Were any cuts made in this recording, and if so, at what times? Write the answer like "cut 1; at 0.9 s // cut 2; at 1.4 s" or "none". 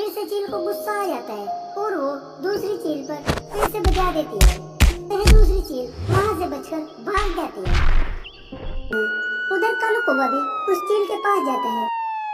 cut 1; at 8.9 s